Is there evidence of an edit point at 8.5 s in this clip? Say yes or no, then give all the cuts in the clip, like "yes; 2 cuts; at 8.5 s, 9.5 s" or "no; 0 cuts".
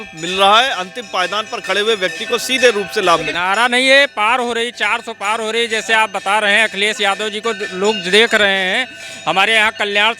no; 1 cut; at 3.3 s